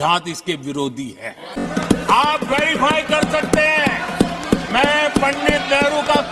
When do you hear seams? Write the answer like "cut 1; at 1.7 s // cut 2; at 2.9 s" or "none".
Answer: cut 1; at 1.7 s